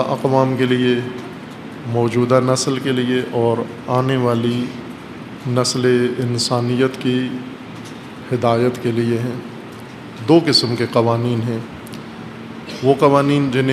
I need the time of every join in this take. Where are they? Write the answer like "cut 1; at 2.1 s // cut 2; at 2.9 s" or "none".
cut 1; at 10.8 s